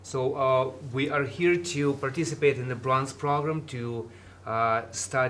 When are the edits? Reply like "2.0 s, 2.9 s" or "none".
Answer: none

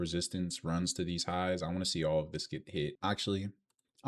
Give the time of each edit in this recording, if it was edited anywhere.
3.0 s

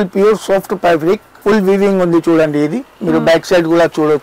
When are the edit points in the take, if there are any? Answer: 1.3 s

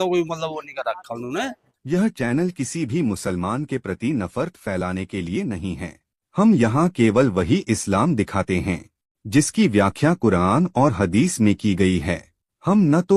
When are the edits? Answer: 1.3 s

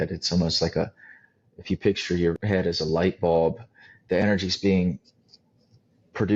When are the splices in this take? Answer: 2.4 s

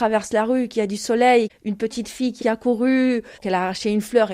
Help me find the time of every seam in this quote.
1.5 s, 3.3 s

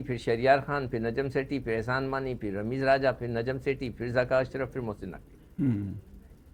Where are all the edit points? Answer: none

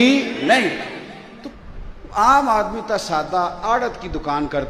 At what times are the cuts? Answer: 1.5 s

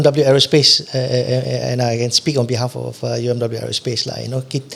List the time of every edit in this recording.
none

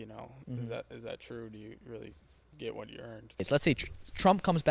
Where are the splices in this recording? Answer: 3.4 s

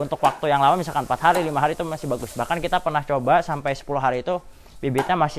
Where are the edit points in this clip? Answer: none

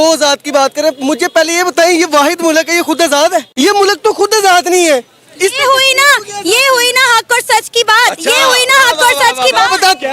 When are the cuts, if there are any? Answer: 3.5 s

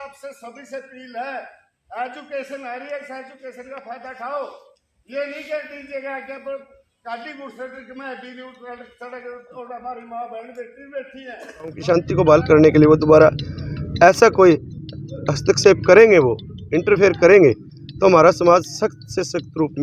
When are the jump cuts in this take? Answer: 11.8 s

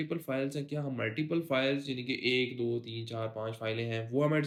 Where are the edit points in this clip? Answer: none

